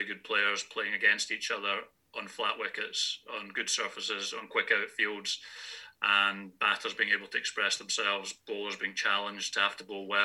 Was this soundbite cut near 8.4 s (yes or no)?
no